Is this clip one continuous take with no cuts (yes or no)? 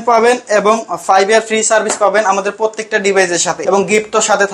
no